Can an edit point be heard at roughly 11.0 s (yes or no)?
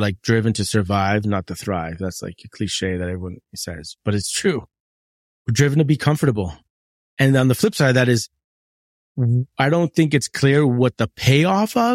no